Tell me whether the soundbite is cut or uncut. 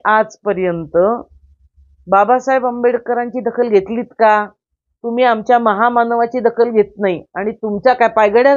uncut